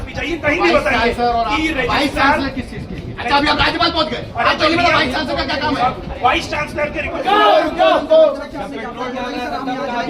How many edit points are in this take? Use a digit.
1